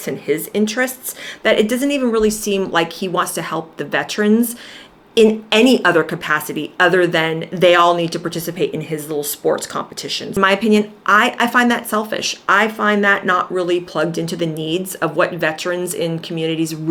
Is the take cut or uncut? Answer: uncut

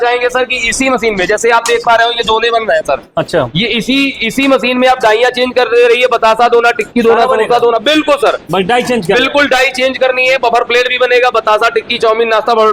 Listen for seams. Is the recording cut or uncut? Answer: uncut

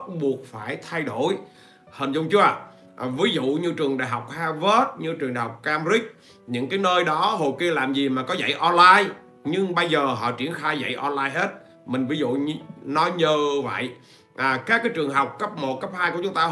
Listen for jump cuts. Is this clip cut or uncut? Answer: uncut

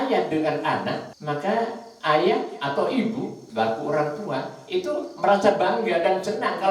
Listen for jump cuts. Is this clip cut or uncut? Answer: cut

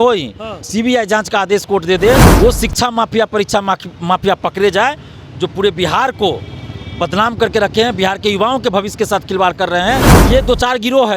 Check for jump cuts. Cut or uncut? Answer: cut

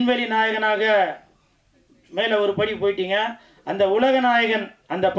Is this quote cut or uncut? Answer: uncut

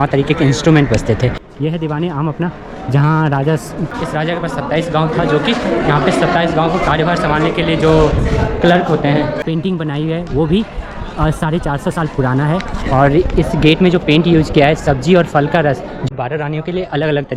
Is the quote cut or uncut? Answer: cut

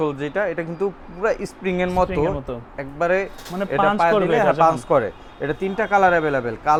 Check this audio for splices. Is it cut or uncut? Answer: uncut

